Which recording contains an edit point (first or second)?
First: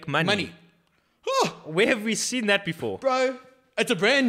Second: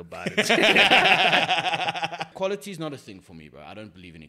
second